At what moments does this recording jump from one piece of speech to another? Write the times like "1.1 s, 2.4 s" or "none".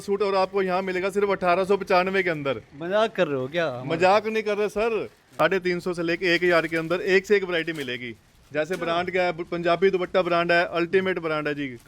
5.3 s